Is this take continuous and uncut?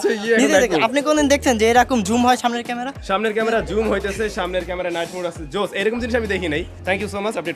yes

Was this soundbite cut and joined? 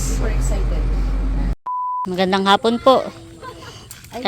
yes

